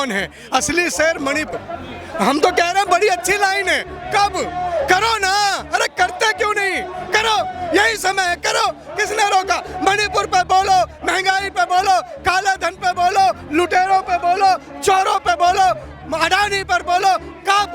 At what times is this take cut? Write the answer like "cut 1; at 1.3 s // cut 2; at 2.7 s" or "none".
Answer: cut 1; at 1.5 s